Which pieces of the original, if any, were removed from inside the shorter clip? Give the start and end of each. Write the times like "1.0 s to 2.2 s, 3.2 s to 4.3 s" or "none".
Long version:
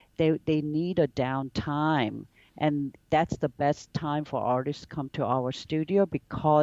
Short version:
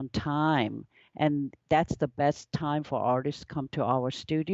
none